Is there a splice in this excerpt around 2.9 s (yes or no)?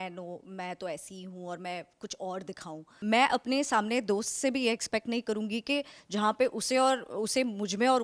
yes